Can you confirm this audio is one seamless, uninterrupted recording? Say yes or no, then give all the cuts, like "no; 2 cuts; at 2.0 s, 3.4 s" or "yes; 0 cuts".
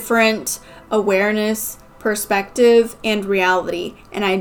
yes; 0 cuts